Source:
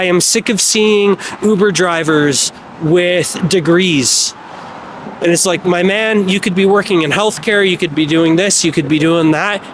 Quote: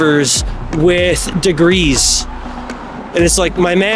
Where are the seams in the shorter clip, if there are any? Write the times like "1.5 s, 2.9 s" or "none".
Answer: none